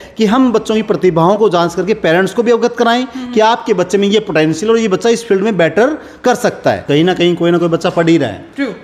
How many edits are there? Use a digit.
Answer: 1